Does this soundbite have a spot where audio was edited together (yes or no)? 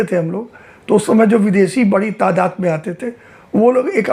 no